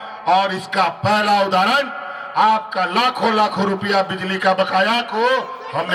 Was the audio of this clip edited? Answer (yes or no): no